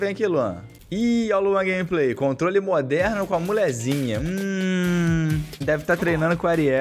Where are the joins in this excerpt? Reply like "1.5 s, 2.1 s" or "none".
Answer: 0.9 s